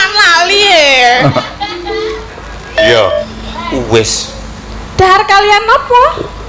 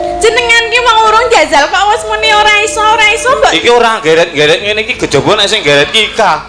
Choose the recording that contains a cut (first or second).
first